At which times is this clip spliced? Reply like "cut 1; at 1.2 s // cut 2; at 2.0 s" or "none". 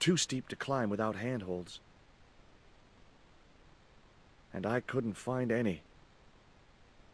cut 1; at 1.7 s // cut 2; at 4.5 s // cut 3; at 5.9 s